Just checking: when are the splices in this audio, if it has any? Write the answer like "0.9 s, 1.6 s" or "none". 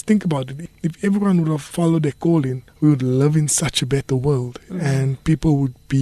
2.6 s